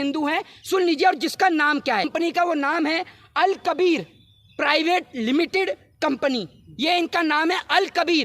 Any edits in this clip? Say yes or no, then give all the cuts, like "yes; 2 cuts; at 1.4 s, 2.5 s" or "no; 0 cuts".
yes; 1 cut; at 2.1 s